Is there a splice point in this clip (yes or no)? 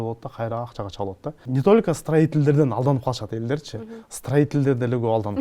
yes